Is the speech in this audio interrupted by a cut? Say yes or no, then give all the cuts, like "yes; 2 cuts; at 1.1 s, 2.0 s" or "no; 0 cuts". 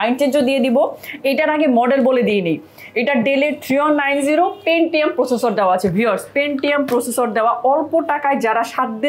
no; 0 cuts